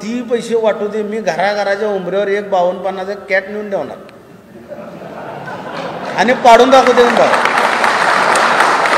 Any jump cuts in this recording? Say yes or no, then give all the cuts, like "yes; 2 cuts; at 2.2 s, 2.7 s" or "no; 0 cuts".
no; 0 cuts